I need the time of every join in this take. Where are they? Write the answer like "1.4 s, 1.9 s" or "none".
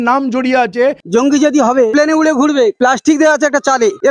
1.0 s, 1.9 s, 2.8 s